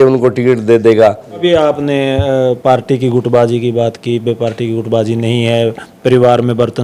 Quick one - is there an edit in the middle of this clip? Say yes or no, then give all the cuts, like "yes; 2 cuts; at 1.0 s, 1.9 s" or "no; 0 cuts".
yes; 1 cut; at 1.4 s